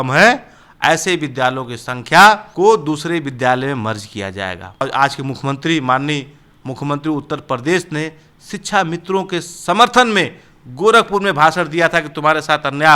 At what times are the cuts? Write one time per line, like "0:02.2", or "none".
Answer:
0:02.5
0:04.8